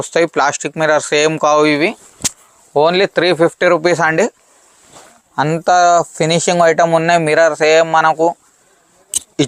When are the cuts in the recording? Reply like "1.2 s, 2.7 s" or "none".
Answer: none